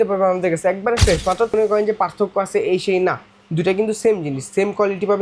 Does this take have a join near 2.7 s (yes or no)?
no